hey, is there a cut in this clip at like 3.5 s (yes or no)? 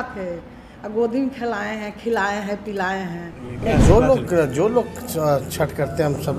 yes